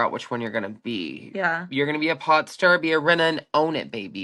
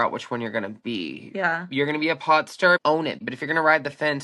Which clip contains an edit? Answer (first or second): second